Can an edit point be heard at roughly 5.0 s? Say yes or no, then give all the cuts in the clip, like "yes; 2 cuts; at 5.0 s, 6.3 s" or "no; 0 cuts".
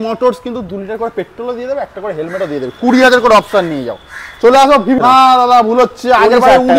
yes; 1 cut; at 5.0 s